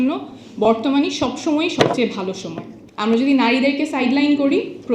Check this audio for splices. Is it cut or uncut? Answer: cut